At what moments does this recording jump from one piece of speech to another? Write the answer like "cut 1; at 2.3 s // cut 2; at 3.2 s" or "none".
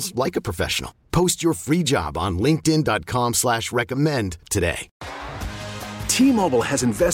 cut 1; at 4.9 s

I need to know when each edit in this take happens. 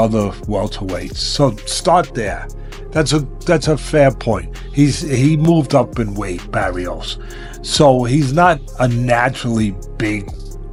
none

